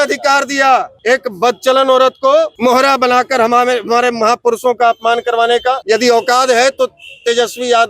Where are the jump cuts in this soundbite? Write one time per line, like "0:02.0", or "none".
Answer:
0:00.9
0:02.5
0:05.8